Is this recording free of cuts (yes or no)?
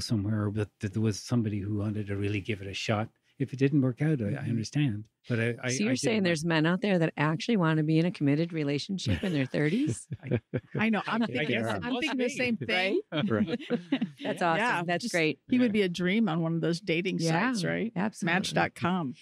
yes